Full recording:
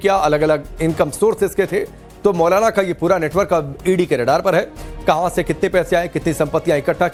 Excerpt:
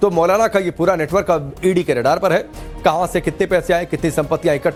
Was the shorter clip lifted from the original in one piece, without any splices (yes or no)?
yes